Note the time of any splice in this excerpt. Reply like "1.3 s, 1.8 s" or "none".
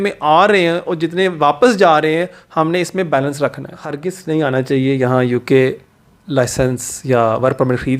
4.1 s